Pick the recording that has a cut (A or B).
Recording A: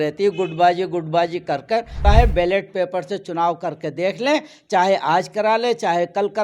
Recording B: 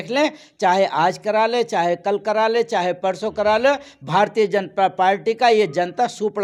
A